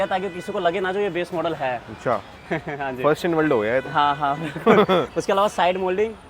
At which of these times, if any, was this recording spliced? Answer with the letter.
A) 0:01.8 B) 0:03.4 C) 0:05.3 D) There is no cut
D